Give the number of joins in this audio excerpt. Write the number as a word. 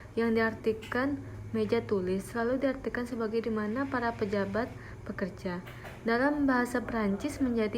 zero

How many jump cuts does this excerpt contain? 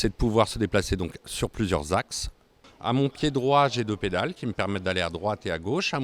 two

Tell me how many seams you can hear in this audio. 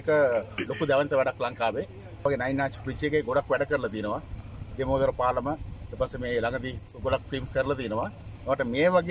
one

